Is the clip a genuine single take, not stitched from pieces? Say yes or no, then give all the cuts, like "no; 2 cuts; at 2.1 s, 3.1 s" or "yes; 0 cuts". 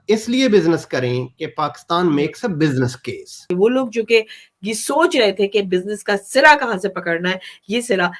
no; 1 cut; at 3.5 s